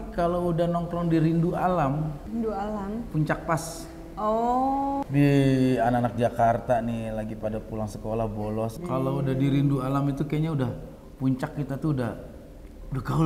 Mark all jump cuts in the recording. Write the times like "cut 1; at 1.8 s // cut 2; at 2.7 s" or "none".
cut 1; at 2.2 s // cut 2; at 5.0 s // cut 3; at 8.8 s